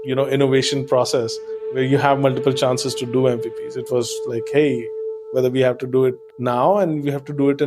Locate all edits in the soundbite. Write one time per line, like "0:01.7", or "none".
0:01.7